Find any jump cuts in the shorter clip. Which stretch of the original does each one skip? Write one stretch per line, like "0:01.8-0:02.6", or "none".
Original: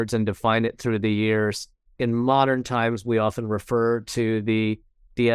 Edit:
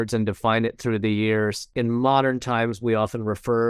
0:01.6-0:01.9

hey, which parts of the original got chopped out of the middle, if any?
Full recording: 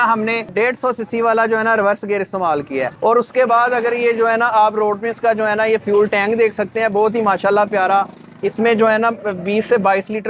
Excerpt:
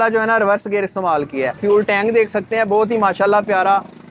0:03.0-0:05.8

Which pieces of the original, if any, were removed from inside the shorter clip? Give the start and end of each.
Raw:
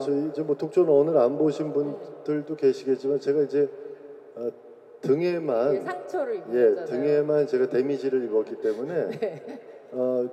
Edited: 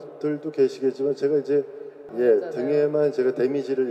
0:04.1-0:06.4

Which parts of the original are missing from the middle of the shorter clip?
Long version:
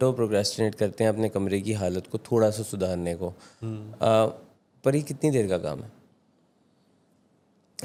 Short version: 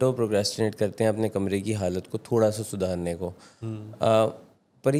none

